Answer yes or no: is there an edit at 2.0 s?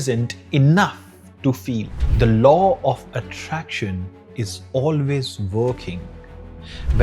yes